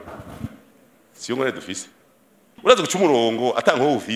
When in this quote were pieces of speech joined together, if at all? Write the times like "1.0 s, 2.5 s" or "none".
2.5 s